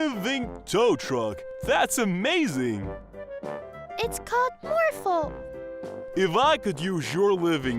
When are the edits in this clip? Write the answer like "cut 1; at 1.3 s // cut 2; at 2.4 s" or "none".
cut 1; at 2.9 s